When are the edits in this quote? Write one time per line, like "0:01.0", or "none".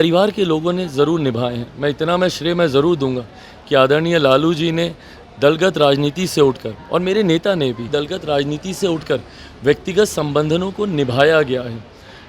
0:07.8